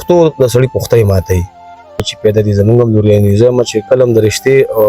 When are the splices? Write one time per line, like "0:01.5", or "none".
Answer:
0:02.0